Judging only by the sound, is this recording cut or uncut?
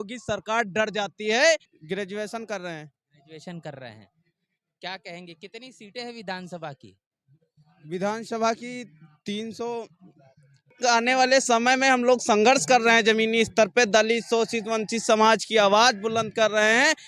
cut